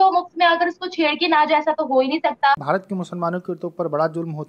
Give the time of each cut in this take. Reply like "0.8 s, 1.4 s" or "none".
2.6 s